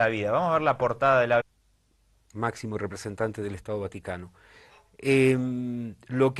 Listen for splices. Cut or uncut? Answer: uncut